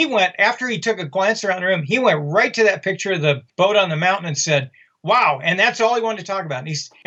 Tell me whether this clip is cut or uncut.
uncut